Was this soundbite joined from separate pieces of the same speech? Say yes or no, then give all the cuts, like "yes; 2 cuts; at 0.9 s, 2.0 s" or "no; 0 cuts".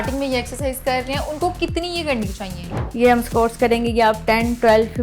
yes; 1 cut; at 2.9 s